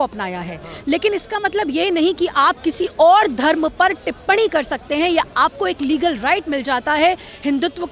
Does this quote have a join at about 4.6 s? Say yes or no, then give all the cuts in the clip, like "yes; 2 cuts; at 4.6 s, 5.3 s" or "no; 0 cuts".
no; 0 cuts